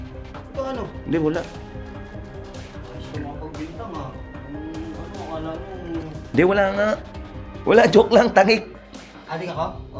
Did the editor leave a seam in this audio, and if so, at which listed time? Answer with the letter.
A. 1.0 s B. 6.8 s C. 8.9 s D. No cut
A